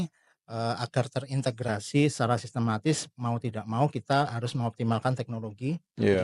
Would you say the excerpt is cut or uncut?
uncut